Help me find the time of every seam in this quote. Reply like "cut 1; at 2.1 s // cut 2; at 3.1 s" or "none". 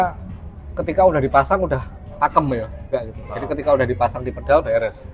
cut 1; at 2.8 s